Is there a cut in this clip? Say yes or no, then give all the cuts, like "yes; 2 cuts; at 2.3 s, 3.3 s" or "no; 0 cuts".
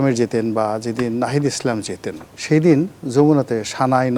no; 0 cuts